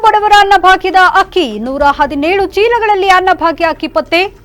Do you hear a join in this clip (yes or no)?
no